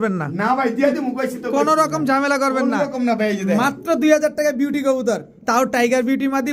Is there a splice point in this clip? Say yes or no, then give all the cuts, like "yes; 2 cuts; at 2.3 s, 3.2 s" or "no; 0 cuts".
no; 0 cuts